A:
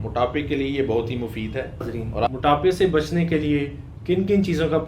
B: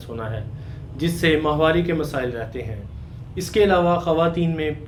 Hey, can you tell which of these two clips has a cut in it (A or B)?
A